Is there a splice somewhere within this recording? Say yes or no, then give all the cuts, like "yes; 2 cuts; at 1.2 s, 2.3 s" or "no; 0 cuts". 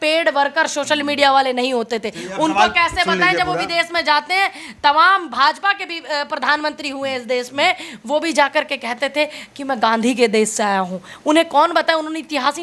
no; 0 cuts